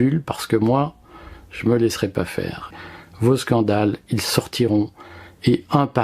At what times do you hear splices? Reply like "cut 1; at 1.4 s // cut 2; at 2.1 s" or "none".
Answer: cut 1; at 2.7 s